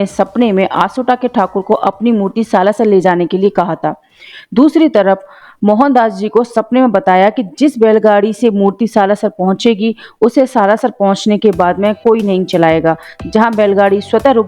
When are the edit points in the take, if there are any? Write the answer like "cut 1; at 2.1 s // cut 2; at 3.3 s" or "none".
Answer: none